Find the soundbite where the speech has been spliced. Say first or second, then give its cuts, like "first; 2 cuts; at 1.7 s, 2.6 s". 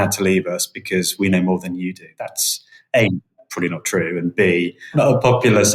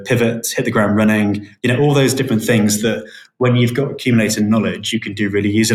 first; 1 cut; at 4.8 s